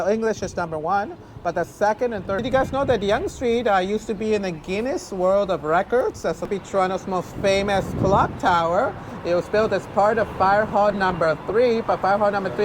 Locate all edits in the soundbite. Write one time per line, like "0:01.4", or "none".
0:02.4
0:06.5